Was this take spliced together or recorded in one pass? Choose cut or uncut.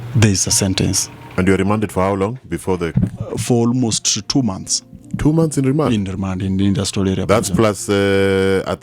cut